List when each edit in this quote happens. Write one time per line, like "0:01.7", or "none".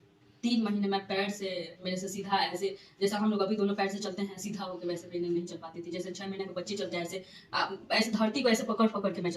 none

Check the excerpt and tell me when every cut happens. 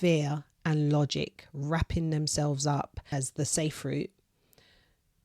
0:03.1

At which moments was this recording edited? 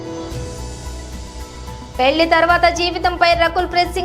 0:01.3

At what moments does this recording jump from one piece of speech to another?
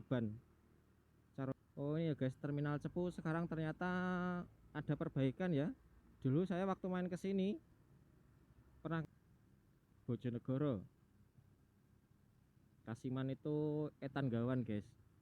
0:01.6
0:09.0

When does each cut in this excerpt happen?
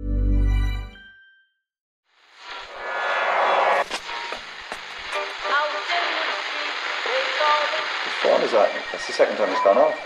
0:01.9

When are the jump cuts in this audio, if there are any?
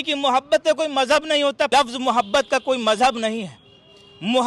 0:01.7

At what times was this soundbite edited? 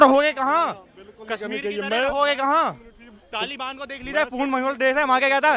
none

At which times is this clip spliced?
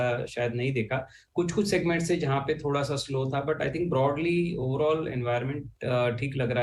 none

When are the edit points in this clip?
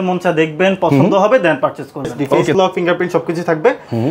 0:02.5

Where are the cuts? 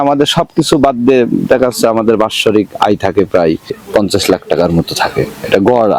0:03.8

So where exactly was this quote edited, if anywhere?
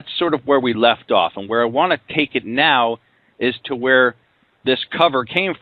none

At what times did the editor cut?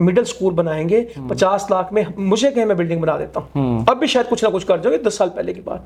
none

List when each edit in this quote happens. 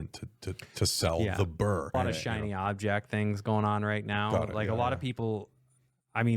0:01.9

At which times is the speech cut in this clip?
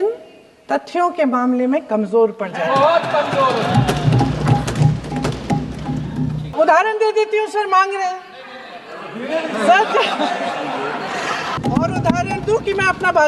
0:06.5
0:11.6

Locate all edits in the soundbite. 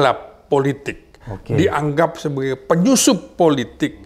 none

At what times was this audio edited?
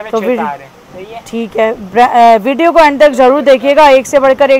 none

